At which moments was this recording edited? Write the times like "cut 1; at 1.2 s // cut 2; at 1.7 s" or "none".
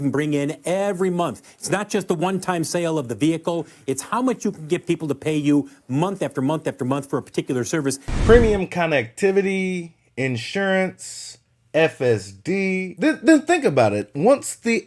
none